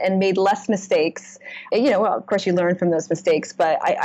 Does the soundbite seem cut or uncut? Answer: cut